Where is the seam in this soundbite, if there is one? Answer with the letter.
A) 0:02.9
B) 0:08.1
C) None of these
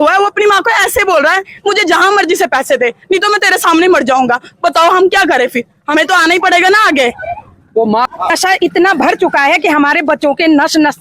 B